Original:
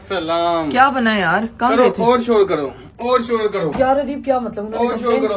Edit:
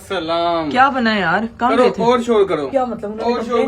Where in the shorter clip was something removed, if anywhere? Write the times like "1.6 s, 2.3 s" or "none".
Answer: 2.7 s